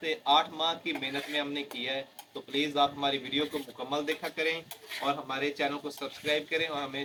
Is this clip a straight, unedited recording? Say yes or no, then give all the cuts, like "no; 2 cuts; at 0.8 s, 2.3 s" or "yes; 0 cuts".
yes; 0 cuts